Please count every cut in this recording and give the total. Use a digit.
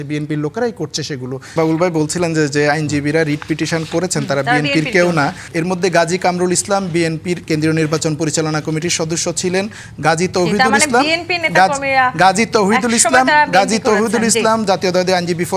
3